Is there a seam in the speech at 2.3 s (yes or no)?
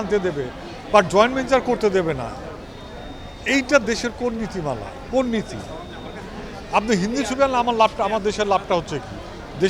no